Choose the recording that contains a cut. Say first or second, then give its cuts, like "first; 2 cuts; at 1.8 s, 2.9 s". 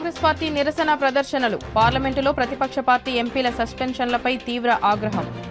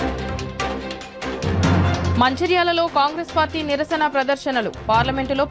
second; 1 cut; at 2.0 s